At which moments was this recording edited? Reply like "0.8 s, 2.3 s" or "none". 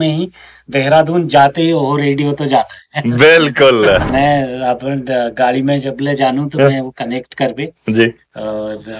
4.1 s